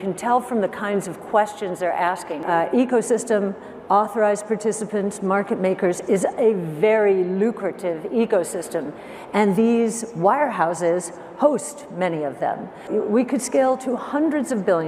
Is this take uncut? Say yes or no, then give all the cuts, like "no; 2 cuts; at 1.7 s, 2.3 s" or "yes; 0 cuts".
no; 2 cuts; at 2.4 s, 12.9 s